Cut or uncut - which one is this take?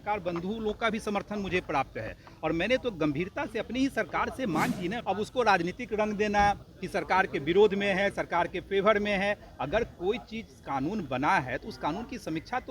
cut